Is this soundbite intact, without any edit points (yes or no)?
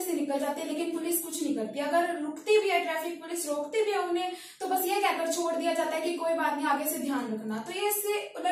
yes